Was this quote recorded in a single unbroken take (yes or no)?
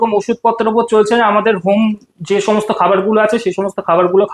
yes